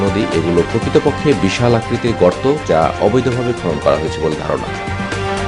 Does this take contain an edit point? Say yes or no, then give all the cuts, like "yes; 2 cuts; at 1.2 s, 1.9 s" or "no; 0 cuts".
no; 0 cuts